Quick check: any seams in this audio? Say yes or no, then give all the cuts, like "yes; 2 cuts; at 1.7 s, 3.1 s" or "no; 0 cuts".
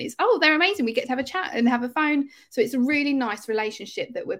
no; 0 cuts